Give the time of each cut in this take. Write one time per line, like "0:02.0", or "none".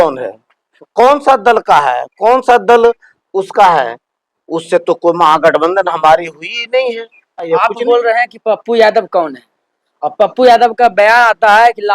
0:07.5